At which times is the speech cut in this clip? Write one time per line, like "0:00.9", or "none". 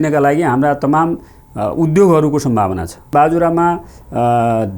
0:03.1